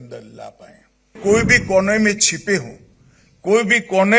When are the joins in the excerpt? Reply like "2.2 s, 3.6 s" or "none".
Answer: 1.2 s

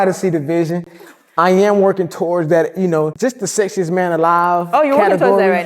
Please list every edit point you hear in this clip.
3.1 s

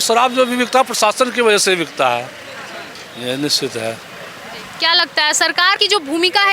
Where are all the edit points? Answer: none

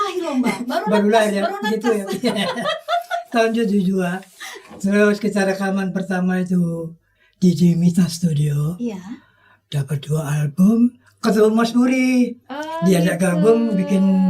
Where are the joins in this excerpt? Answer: 11.1 s

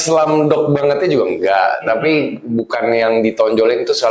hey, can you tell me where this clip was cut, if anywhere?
none

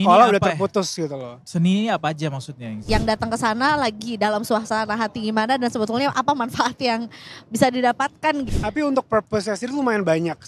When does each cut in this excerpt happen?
2.8 s, 8.4 s

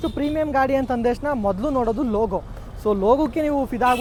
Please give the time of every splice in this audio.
none

